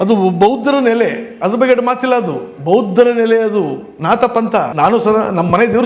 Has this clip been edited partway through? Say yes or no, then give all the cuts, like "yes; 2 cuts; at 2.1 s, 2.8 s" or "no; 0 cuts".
yes; 1 cut; at 4.7 s